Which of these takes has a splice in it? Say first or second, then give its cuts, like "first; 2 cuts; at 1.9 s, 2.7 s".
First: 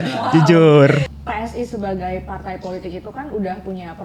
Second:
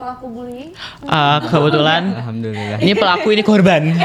first; 1 cut; at 1.1 s